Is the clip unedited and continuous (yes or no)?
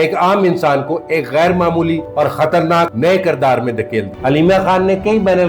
no